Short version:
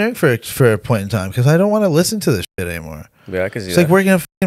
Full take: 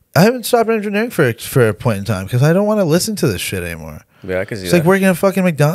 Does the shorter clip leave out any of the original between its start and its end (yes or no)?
no